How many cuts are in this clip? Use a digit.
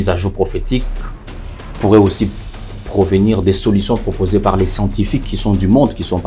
0